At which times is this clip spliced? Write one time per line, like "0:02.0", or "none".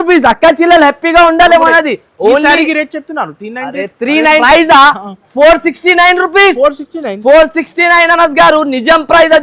0:04.4